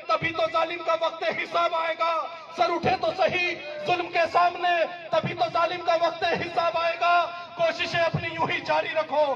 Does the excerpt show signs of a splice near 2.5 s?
no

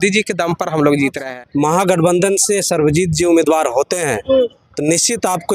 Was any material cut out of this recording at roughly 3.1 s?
no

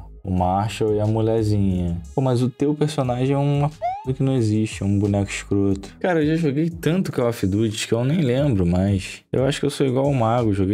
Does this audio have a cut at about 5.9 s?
yes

